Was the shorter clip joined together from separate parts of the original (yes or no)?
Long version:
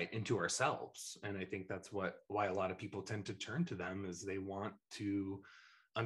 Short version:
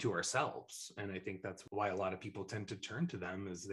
yes